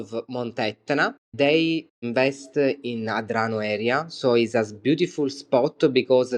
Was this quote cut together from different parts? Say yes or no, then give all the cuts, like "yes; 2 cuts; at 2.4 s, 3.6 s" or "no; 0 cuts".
yes; 1 cut; at 2.1 s